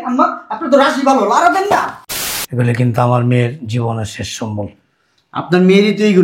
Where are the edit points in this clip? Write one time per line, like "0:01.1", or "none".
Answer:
0:02.0